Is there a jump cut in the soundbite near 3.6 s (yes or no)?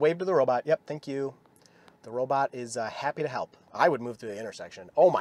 yes